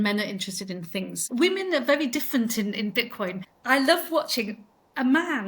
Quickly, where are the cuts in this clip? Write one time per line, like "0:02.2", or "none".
0:01.2
0:03.5